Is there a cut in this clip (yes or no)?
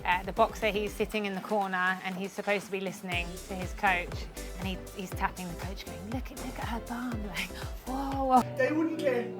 yes